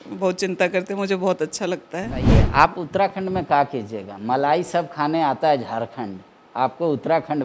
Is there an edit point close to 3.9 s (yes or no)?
no